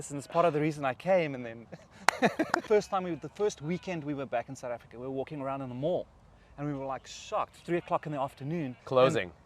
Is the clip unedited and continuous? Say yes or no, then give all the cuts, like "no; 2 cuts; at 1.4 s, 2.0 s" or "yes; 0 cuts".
no; 1 cut; at 2.6 s